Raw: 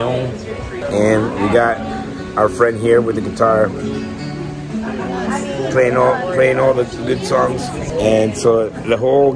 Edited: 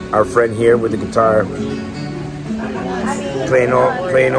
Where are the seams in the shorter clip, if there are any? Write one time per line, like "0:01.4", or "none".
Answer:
none